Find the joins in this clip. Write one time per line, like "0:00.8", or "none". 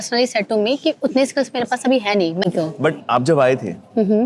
0:02.5